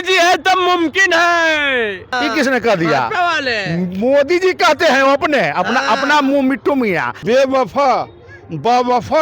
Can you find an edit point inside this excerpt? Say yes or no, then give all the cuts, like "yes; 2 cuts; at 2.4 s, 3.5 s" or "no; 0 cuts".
yes; 2 cuts; at 2.1 s, 7.2 s